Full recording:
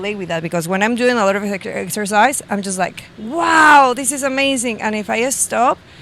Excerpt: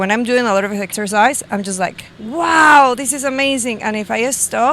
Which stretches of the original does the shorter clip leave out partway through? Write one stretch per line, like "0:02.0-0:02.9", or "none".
0:01.6-0:01.9